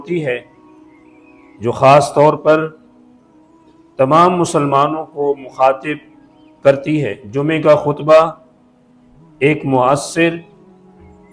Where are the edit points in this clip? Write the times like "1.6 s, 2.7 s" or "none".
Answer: 7.2 s